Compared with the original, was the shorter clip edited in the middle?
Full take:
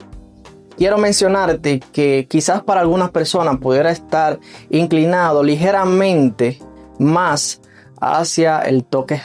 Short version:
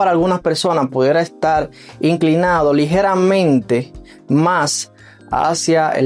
no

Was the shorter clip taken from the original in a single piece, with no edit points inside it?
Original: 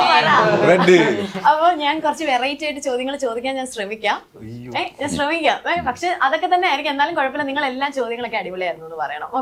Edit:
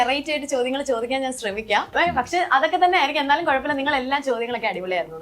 no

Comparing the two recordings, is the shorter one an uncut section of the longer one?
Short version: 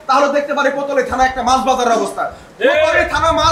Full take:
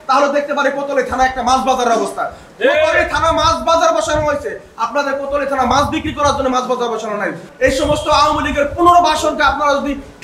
yes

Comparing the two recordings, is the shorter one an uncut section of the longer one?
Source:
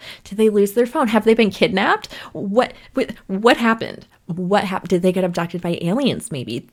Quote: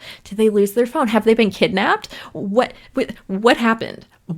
yes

